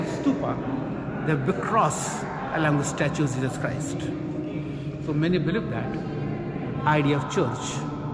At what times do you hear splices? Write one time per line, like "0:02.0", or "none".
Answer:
none